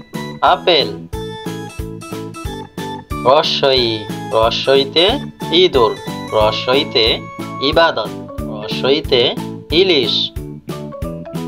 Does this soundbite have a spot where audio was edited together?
yes; 3 cuts; at 1.1 s, 3.2 s, 10.1 s

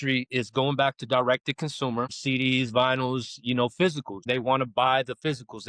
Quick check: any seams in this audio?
yes; 2 cuts; at 2.2 s, 4.2 s

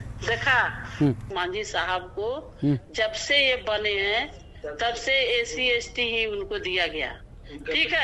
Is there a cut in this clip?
yes; 1 cut; at 1.3 s

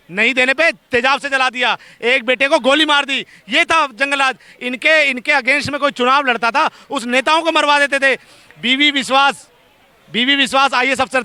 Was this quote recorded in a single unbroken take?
yes; 0 cuts

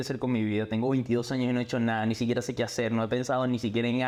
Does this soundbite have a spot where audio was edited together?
no; 0 cuts

